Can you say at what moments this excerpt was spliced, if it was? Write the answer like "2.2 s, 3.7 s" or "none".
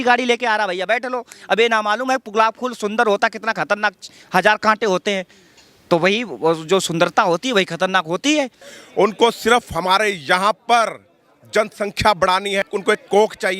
8.6 s, 12.6 s